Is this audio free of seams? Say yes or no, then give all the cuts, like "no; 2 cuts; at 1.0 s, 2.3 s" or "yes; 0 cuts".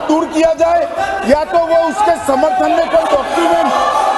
yes; 0 cuts